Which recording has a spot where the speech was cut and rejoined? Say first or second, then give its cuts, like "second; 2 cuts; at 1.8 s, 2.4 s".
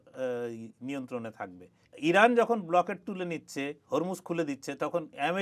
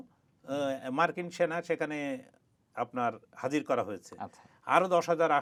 first; 1 cut; at 1.8 s